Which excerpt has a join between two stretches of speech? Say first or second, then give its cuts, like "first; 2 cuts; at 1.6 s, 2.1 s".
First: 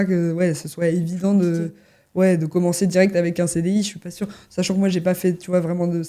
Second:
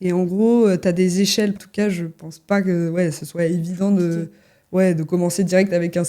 second; 1 cut; at 1.6 s